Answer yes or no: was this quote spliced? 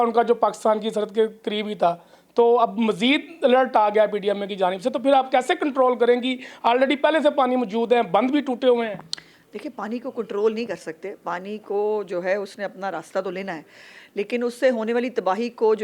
no